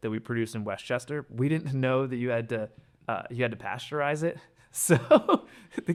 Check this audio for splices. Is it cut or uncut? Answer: uncut